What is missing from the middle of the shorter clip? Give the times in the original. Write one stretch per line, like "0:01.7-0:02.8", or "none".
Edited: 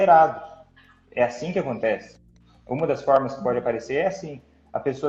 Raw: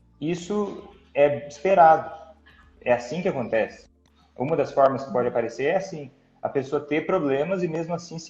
none